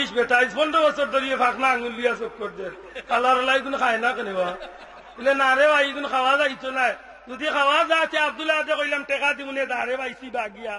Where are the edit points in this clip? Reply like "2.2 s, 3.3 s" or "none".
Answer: none

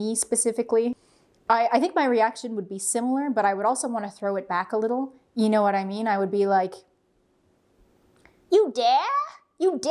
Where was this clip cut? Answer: 1.0 s

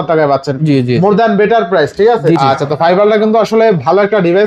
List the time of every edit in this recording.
2.4 s

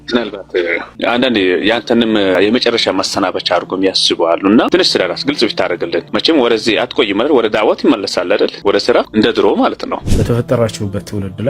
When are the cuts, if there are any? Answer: 1.0 s, 2.3 s, 10.1 s

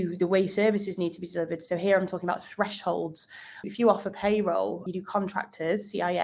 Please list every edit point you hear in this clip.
3.7 s, 4.8 s

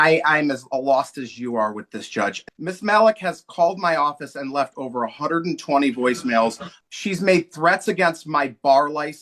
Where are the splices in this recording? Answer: 2.4 s, 6.7 s

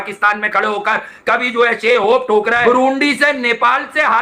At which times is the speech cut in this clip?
2.6 s

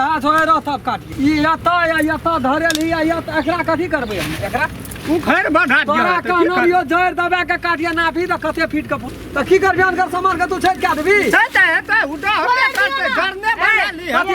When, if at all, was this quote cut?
1.1 s, 9.2 s

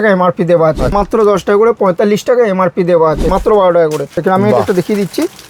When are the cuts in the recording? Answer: 0.9 s, 3.3 s, 4.1 s

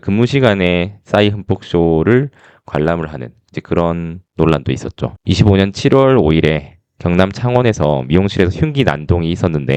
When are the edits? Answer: 5.2 s

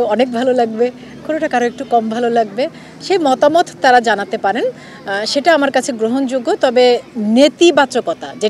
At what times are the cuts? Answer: none

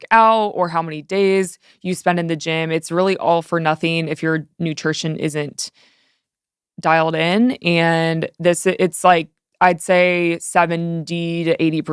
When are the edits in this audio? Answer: none

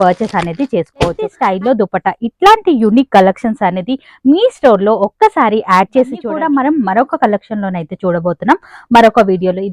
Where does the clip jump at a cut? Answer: 1.4 s, 6.2 s

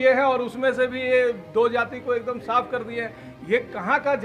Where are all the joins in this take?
none

